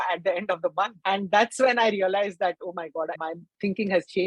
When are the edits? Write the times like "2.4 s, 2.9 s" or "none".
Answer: 1.0 s, 3.2 s